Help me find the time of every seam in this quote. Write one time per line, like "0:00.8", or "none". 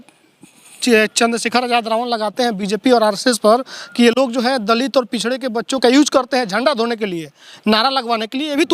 none